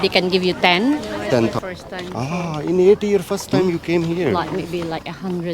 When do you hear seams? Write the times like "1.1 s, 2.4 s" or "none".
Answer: 1.5 s, 4.4 s